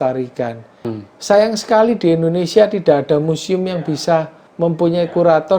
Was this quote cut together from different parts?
yes; 2 cuts; at 0.9 s, 4.4 s

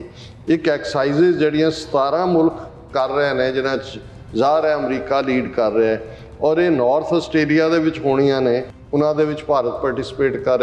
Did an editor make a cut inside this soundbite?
yes; 1 cut; at 8.8 s

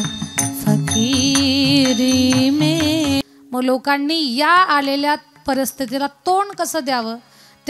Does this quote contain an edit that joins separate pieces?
yes; 1 cut; at 3.2 s

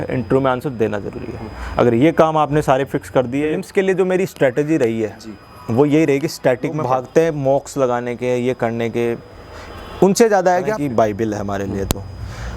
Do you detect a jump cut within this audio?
yes; 3 cuts; at 3.6 s, 6.8 s, 10.7 s

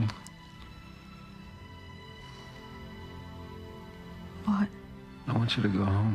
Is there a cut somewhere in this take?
yes; 1 cut; at 2.3 s

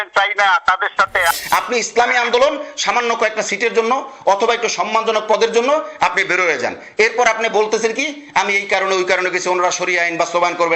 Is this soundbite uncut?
no; 1 cut; at 1.3 s

